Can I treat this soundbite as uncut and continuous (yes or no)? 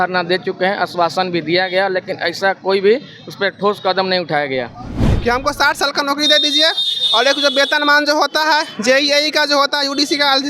no